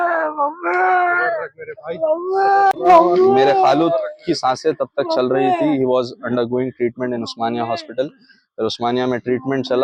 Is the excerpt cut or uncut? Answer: uncut